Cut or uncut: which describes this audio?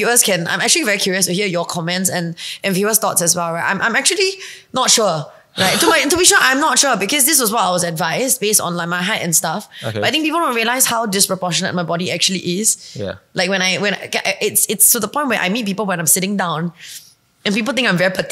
uncut